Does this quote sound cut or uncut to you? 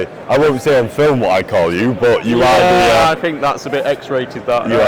uncut